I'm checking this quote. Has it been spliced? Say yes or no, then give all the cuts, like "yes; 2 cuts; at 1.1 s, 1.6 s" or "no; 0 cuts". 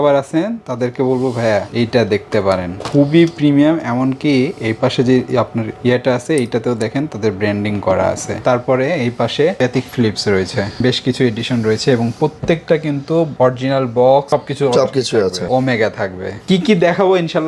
no; 0 cuts